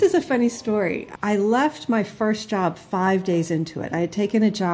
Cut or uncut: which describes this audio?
cut